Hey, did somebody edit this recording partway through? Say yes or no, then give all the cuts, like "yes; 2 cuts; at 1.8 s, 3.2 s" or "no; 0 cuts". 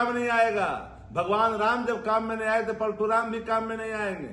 no; 0 cuts